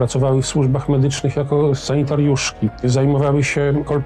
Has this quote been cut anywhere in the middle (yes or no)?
yes